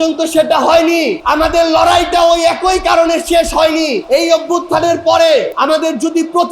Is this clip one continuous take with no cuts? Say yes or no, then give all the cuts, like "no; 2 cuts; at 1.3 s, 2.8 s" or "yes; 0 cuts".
no; 3 cuts; at 1.2 s, 4.0 s, 5.5 s